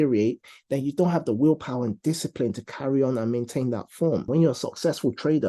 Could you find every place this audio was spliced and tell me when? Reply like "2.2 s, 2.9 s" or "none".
4.3 s